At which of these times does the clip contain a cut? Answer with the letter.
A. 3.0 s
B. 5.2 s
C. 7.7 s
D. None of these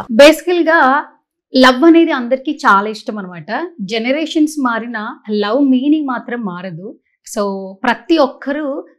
D